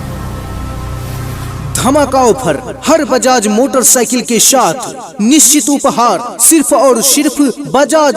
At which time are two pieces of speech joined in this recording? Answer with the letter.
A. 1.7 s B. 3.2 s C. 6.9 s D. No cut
A